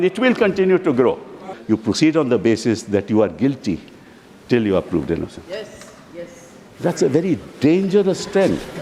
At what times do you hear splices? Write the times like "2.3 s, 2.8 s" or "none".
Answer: 1.5 s